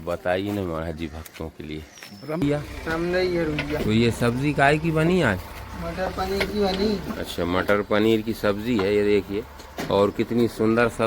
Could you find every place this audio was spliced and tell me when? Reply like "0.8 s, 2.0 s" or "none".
2.4 s